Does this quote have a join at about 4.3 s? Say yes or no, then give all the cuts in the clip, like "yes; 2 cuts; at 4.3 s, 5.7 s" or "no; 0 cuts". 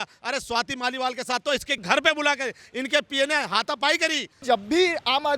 yes; 2 cuts; at 1.8 s, 4.3 s